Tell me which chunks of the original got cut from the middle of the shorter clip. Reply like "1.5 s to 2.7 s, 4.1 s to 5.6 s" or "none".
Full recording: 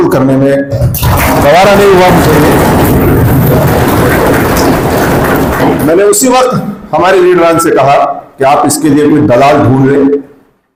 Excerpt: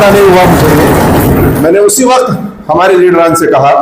3.2 s to 5.8 s